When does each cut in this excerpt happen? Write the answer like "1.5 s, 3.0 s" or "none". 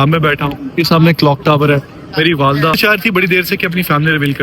2.8 s